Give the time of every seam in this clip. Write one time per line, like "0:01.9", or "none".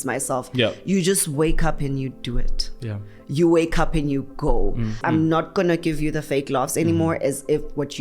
0:05.0